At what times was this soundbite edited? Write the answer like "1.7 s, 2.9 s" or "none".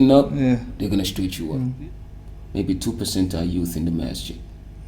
1.4 s